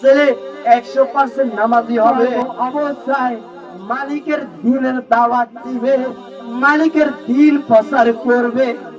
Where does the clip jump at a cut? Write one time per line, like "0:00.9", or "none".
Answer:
0:02.4